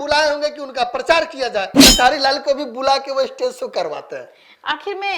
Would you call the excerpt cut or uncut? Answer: cut